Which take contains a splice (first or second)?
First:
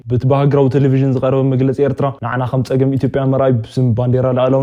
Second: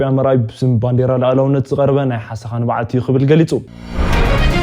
second